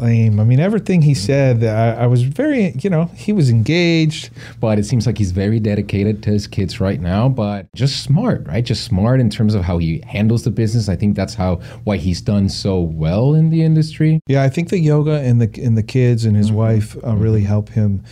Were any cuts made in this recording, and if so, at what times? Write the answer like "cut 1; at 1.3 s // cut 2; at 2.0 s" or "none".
cut 1; at 4.5 s // cut 2; at 7.8 s // cut 3; at 14.2 s